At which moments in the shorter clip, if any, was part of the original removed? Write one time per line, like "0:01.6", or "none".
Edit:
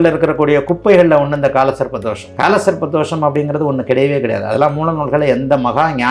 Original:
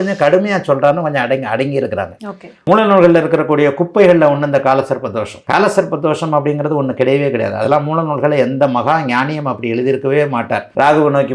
none